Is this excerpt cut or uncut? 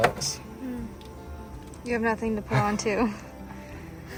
uncut